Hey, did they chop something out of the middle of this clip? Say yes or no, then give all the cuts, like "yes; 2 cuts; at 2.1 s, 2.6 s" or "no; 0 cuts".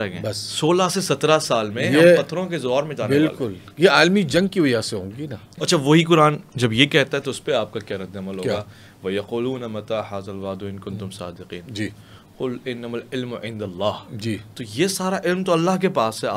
yes; 1 cut; at 5.5 s